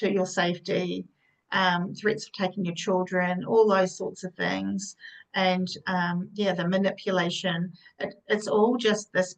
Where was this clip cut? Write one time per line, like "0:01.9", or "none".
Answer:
none